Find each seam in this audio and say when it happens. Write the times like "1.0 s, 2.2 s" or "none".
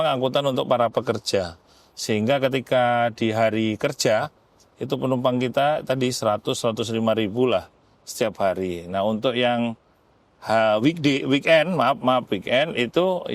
none